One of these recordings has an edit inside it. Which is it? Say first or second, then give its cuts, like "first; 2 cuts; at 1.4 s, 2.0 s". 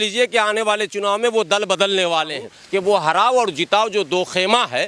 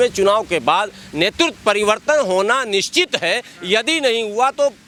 first; 1 cut; at 2.6 s